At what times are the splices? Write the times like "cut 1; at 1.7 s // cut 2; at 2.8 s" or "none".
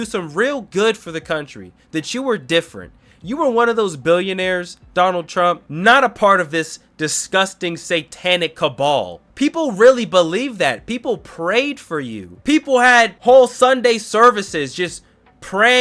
cut 1; at 5.7 s // cut 2; at 9.2 s // cut 3; at 12.3 s // cut 4; at 13.2 s

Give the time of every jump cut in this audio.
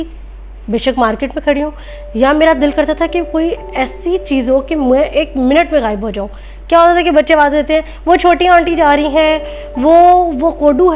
none

